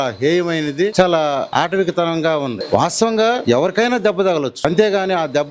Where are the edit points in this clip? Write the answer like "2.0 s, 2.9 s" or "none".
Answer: 0.9 s, 1.5 s, 2.6 s, 3.4 s, 4.6 s